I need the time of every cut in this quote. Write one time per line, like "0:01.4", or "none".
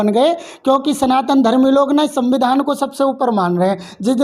none